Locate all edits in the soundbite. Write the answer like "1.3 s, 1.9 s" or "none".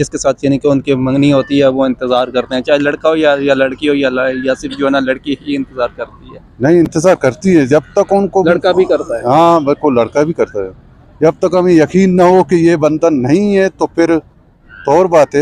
none

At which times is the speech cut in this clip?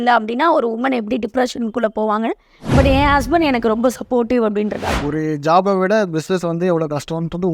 4.9 s

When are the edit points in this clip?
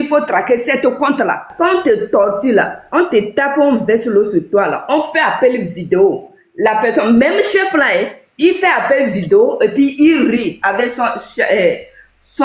1.5 s

